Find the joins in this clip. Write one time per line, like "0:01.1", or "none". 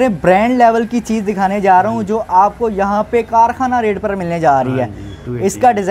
none